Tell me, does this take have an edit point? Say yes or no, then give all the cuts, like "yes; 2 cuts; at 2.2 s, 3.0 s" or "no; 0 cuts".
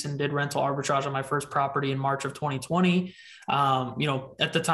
no; 0 cuts